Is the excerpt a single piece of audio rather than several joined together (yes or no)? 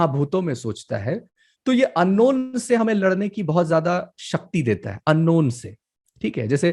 yes